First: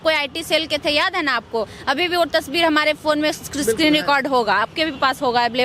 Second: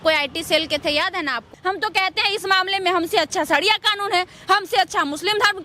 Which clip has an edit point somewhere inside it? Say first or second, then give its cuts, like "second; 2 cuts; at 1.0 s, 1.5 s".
second; 1 cut; at 1.4 s